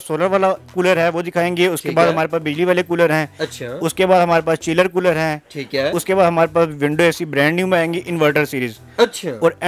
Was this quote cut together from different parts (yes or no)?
no